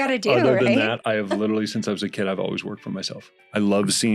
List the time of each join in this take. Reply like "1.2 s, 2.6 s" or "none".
3.2 s